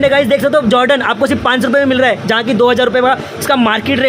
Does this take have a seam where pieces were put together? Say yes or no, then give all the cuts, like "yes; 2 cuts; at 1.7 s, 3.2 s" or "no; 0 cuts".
no; 0 cuts